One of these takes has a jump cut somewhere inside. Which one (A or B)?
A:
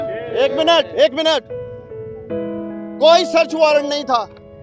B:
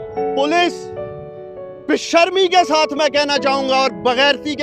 A